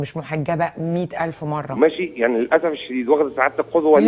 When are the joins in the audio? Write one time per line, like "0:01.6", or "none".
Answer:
0:01.7